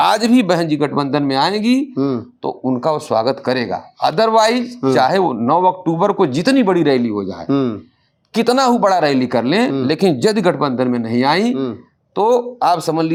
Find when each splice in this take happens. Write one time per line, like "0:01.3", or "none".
none